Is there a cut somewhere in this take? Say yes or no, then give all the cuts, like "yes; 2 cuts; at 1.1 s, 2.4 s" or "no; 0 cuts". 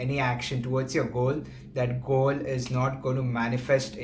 no; 0 cuts